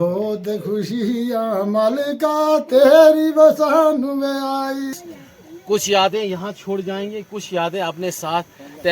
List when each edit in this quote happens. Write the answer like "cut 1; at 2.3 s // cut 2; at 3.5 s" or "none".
cut 1; at 4.9 s